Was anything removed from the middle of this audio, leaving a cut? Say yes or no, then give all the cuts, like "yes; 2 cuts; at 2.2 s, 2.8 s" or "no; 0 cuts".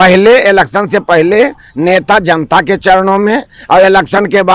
no; 0 cuts